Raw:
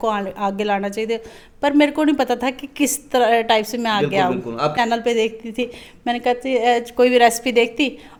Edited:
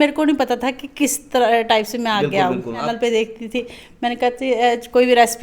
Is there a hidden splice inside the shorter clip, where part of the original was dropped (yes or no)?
yes